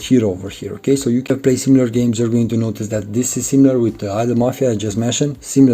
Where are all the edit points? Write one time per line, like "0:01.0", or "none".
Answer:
0:01.3